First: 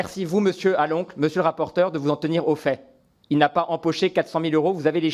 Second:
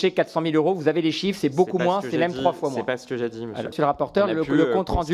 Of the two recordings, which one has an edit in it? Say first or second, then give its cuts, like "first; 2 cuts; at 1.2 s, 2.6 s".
second; 1 cut; at 3.7 s